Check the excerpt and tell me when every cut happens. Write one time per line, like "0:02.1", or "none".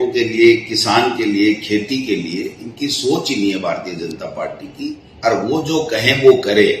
0:05.1